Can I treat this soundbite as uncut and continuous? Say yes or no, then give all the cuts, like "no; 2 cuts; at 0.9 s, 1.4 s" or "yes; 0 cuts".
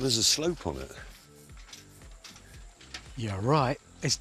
yes; 0 cuts